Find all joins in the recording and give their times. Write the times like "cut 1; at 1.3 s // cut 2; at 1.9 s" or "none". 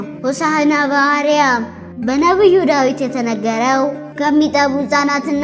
cut 1; at 1.8 s